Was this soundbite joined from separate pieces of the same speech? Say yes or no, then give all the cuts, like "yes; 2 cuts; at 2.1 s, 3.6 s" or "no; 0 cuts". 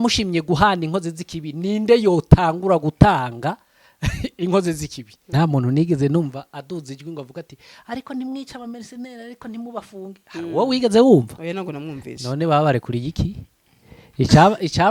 yes; 1 cut; at 5.3 s